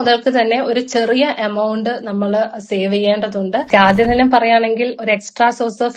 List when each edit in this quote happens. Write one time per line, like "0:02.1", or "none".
0:03.7